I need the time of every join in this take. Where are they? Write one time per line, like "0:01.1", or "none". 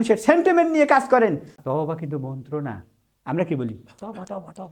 0:01.6